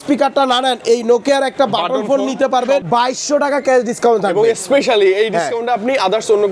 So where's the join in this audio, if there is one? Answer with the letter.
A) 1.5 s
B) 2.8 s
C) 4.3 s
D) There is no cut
B